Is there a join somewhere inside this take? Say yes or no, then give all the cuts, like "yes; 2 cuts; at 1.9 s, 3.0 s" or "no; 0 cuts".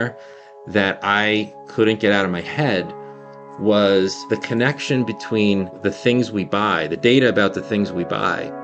yes; 2 cuts; at 4.2 s, 5.8 s